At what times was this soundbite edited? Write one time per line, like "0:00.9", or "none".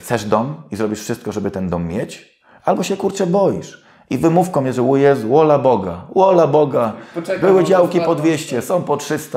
none